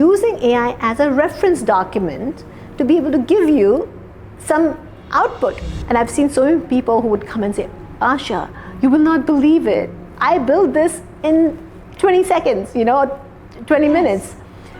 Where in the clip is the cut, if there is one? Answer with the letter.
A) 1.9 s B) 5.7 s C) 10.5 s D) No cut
B